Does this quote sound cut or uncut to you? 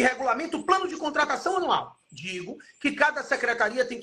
uncut